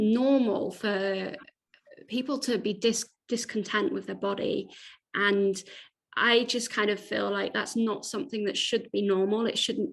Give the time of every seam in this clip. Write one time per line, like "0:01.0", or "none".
none